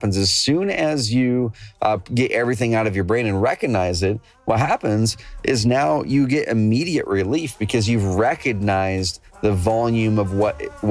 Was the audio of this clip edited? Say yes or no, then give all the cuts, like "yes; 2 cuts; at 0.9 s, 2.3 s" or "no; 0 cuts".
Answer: no; 0 cuts